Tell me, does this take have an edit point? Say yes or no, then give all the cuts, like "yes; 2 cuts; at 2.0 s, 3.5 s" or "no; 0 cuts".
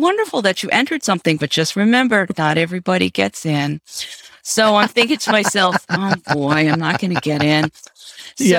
no; 0 cuts